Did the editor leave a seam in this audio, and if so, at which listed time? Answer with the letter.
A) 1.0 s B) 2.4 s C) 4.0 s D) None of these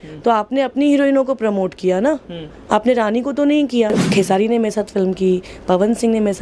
C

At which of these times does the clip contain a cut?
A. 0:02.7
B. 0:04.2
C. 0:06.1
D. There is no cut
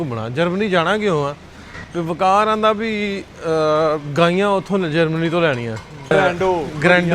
C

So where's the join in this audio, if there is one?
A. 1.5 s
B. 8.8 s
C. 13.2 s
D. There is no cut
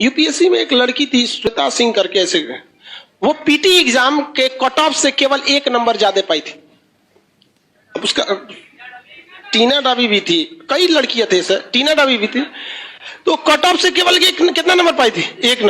A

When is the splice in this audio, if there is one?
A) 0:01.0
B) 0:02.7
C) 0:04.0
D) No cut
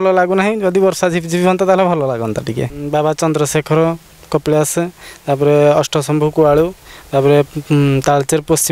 B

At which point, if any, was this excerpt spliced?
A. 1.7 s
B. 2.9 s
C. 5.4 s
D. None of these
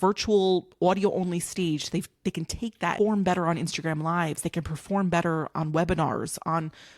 B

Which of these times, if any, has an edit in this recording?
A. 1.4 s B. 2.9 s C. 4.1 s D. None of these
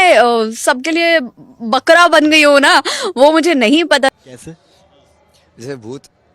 C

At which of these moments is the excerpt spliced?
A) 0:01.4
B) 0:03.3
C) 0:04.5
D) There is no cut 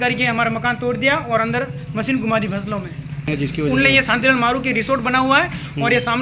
B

